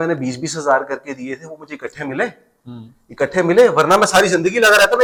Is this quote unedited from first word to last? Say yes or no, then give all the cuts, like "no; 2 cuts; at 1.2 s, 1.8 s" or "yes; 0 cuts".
yes; 0 cuts